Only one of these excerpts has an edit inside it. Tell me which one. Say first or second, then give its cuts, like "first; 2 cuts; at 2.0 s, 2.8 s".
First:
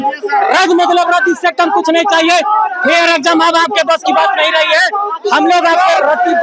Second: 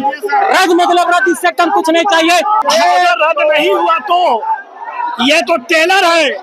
second; 1 cut; at 2.6 s